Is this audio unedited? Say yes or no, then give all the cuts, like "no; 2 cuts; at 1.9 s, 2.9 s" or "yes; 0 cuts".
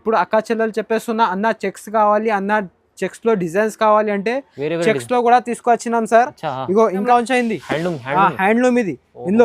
no; 1 cut; at 7.0 s